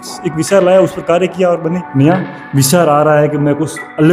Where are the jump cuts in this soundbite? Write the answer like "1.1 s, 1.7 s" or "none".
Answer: 1.8 s